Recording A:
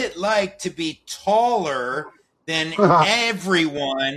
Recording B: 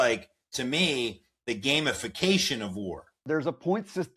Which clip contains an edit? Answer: B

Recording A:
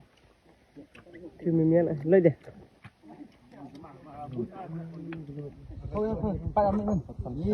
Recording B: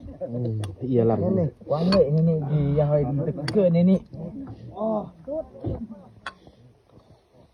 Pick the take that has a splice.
A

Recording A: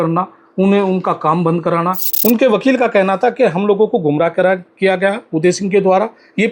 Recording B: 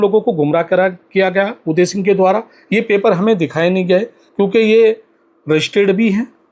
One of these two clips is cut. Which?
A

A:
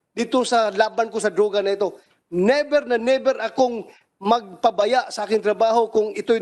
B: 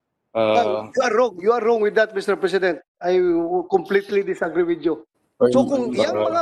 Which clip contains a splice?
B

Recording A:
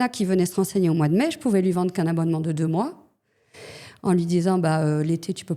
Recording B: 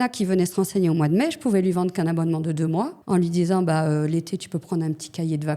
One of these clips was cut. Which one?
B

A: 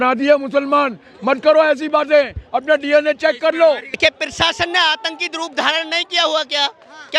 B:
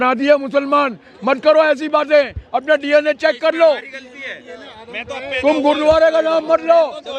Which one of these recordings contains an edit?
A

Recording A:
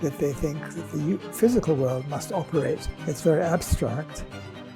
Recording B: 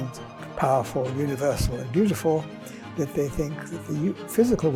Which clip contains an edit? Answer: A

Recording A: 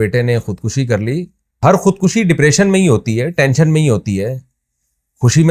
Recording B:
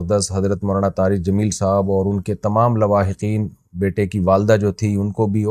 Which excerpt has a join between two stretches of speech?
A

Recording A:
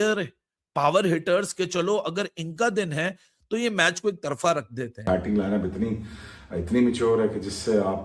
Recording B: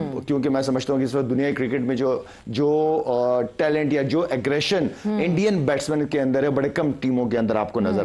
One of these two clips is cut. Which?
A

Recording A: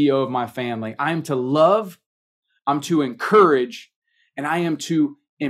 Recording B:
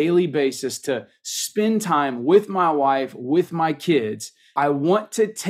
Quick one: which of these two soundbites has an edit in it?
B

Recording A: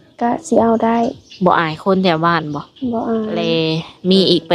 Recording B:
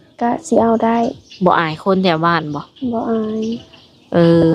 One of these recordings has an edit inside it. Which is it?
A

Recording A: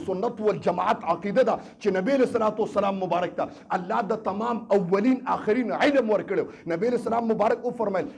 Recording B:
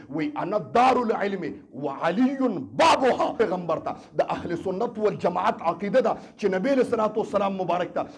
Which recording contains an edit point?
B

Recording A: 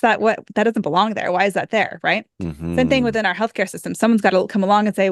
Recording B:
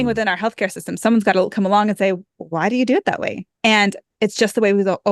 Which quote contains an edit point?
B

